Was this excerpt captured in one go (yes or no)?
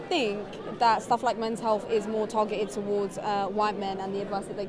yes